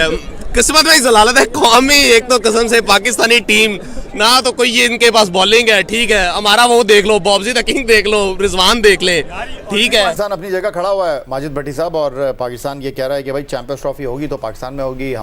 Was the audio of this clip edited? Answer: yes; 1 cut; at 10.2 s

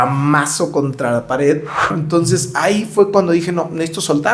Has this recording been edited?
yes; 1 cut; at 2.0 s

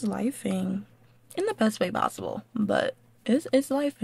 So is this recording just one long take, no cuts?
yes; 0 cuts

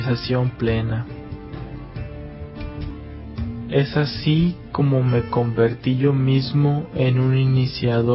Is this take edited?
no; 0 cuts

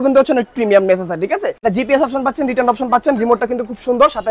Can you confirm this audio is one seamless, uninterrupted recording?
no; 1 cut; at 1.5 s

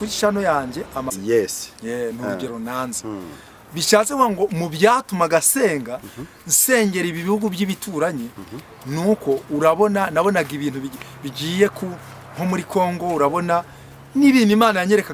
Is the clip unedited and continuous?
no; 1 cut; at 1.1 s

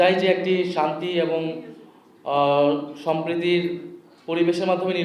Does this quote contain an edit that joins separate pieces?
no; 0 cuts

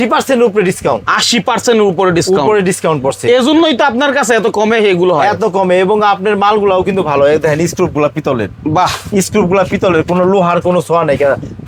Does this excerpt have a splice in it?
no; 0 cuts

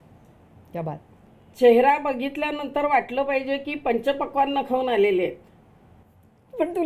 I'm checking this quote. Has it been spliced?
no; 0 cuts

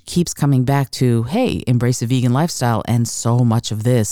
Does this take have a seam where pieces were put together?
no; 0 cuts

